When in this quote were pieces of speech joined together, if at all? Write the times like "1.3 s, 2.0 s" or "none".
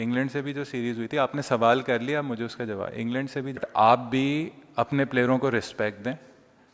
3.6 s